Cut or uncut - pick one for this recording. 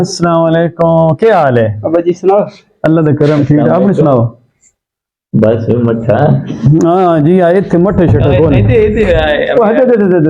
uncut